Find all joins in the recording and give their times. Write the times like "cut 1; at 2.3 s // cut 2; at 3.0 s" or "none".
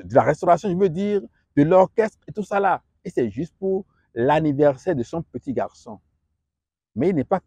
none